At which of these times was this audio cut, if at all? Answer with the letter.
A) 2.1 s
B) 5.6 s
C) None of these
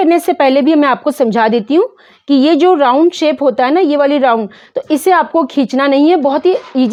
C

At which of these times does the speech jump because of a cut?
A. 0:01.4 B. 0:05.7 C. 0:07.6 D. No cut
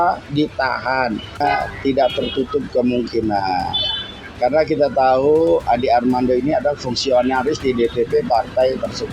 A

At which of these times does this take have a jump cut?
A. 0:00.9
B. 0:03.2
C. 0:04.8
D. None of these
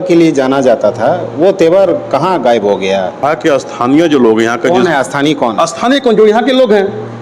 B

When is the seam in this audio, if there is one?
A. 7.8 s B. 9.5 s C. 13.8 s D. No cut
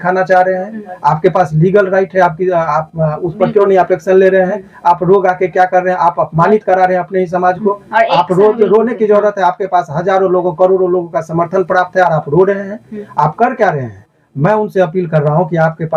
D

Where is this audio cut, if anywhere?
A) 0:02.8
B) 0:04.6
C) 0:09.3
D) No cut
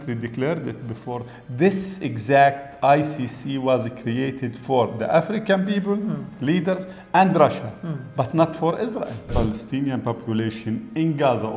C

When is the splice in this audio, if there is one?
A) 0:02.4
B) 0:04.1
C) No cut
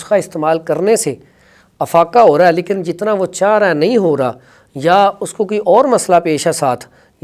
C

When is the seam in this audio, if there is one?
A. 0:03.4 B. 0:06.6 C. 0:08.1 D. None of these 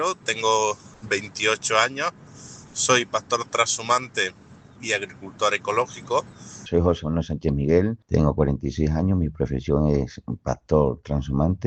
B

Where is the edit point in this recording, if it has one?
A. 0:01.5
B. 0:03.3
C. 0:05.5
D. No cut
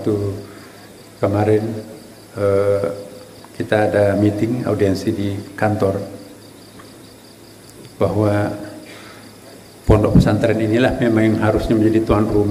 D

